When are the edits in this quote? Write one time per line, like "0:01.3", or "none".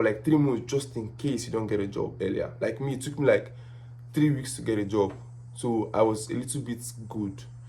none